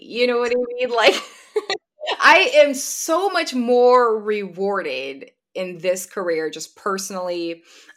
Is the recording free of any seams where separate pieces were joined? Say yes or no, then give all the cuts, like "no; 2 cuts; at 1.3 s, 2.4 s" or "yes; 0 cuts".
yes; 0 cuts